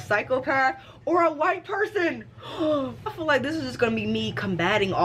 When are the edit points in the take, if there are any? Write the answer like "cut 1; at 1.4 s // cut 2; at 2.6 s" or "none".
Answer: cut 1; at 3.1 s

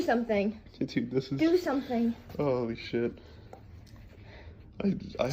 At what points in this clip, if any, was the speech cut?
none

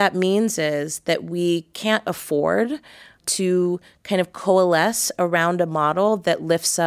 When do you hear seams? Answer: cut 1; at 3.2 s

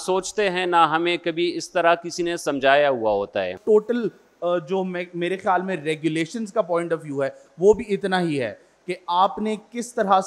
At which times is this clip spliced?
cut 1; at 3.6 s

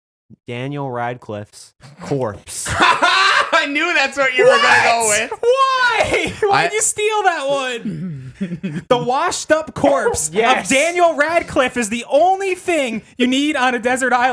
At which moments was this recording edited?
none

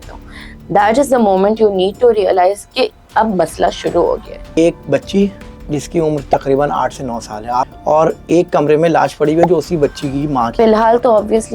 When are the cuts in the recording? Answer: cut 1; at 4.6 s // cut 2; at 7.7 s // cut 3; at 10.5 s

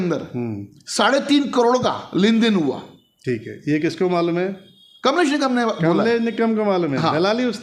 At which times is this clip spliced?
none

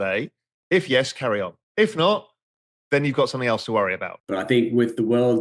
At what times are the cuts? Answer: cut 1; at 1.6 s // cut 2; at 4.1 s

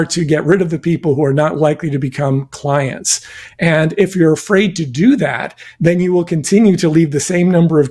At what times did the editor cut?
none

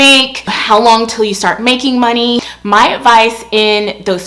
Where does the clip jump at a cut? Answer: cut 1; at 2.4 s

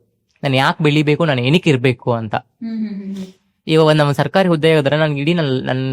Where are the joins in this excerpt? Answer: none

